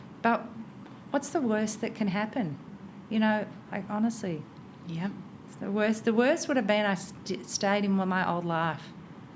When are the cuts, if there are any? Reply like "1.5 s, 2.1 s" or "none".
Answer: none